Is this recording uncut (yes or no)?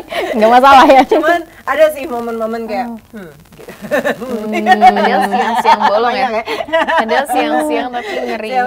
yes